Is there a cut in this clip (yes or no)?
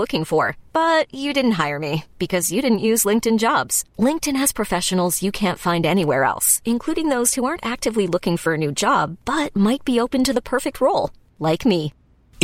no